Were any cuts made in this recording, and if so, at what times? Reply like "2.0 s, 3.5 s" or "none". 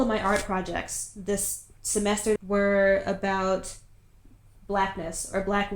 2.3 s